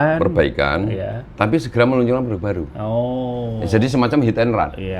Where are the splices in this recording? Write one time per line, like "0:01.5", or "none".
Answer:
none

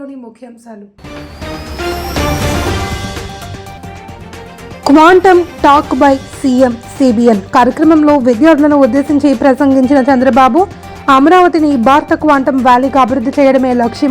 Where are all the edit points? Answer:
0:00.9

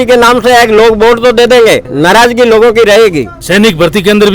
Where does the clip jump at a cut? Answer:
0:01.9
0:03.4

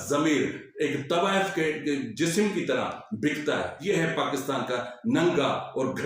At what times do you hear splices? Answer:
0:03.8

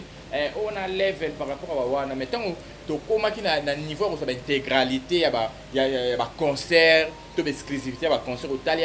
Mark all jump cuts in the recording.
none

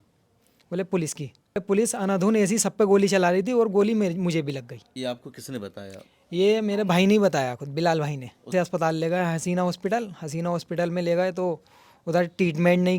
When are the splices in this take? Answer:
0:01.6
0:04.8
0:08.5

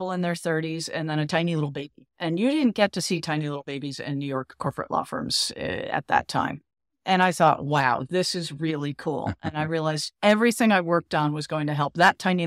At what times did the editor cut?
none

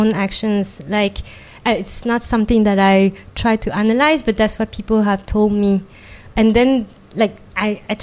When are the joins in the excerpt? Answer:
0:06.3

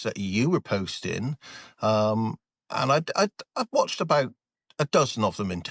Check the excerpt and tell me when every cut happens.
none

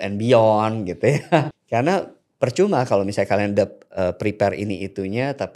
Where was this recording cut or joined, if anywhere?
0:01.6

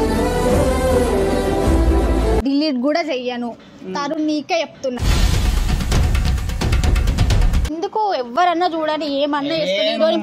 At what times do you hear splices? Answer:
0:02.4
0:07.7

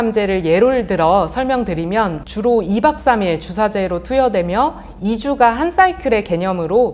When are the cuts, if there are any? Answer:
0:02.2

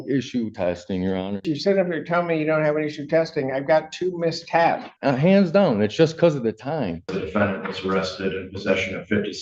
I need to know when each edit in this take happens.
0:01.5
0:04.9
0:07.2

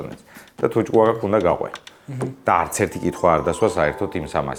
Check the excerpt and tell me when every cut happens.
none

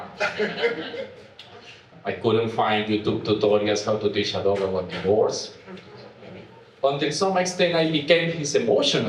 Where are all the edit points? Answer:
0:02.0

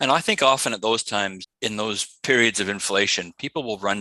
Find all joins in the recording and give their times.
0:01.4

